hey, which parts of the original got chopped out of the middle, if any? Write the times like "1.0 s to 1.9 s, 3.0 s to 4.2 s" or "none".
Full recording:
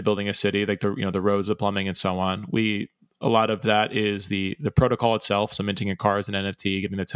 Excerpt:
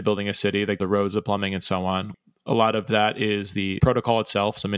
0.8 s to 1.1 s, 2.4 s to 2.9 s, 4.5 s to 4.7 s